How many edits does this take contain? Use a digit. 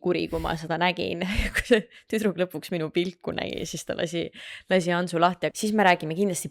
1